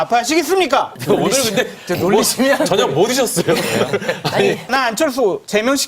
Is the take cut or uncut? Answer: cut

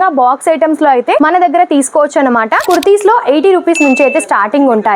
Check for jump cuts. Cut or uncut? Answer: cut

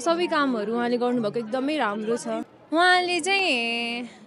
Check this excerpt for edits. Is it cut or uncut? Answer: cut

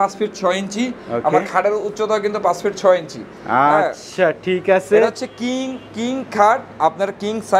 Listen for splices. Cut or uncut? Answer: uncut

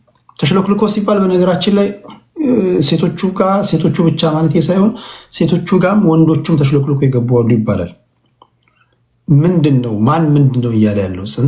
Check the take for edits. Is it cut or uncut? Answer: uncut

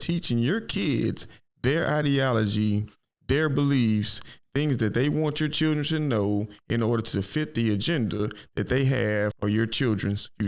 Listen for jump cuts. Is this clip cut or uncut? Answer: cut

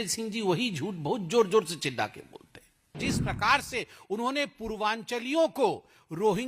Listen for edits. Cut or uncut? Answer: cut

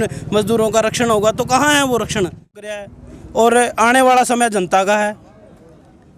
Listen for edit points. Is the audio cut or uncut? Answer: cut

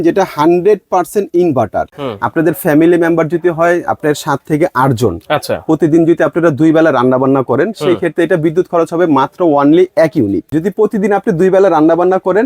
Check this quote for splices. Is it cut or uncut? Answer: cut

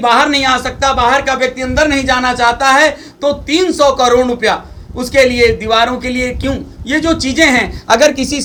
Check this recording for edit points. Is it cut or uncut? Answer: uncut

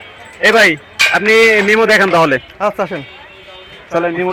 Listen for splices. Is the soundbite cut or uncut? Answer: uncut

